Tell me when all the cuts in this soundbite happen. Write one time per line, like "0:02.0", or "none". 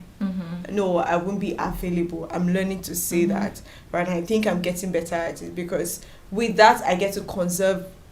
none